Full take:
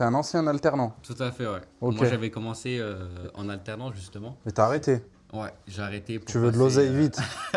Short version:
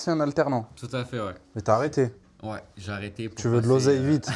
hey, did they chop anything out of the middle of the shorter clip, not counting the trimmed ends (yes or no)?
yes